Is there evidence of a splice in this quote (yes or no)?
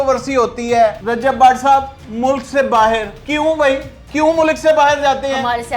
yes